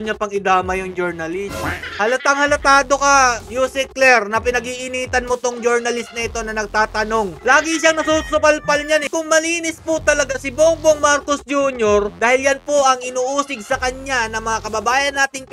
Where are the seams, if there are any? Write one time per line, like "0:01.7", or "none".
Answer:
0:07.3
0:09.1
0:12.1